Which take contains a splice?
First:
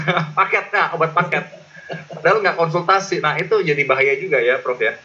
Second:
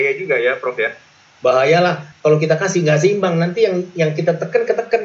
second; 1 cut; at 2.1 s

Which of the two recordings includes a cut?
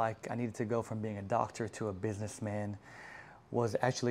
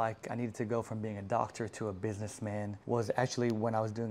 second; 1 cut; at 2.8 s

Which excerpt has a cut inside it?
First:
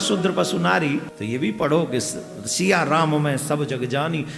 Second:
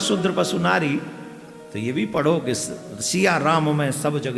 first; 1 cut; at 1.1 s

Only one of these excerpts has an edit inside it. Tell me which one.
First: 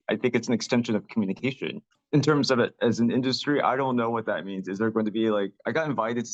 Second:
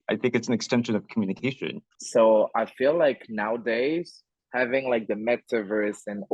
second; 1 cut; at 1.9 s

